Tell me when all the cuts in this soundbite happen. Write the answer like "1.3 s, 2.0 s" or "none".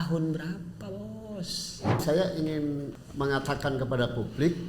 2.0 s, 2.9 s